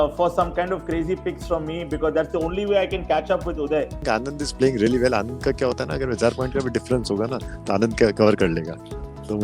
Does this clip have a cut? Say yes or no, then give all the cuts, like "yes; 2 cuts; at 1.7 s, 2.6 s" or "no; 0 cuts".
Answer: no; 0 cuts